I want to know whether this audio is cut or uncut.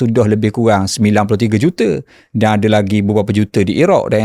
uncut